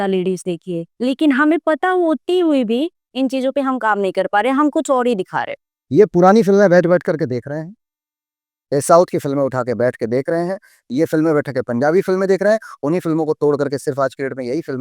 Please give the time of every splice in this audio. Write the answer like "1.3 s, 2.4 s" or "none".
5.4 s